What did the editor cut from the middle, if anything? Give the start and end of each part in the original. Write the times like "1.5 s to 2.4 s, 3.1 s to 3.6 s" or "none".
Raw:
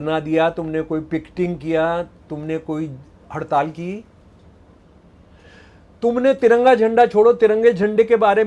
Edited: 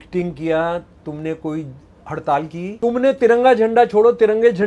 4.0 s to 5.9 s